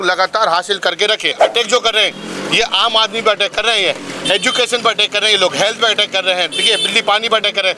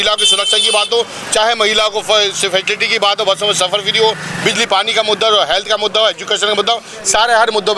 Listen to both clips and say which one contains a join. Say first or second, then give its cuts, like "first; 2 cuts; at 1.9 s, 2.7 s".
first; 1 cut; at 1.4 s